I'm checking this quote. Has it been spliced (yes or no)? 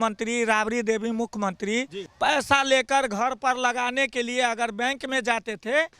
yes